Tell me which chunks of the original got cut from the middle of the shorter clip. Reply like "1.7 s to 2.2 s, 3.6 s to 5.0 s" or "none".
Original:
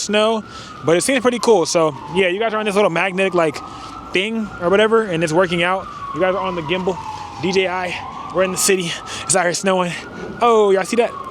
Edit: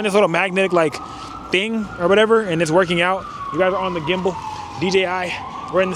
none